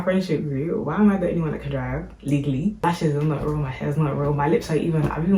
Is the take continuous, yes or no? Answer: no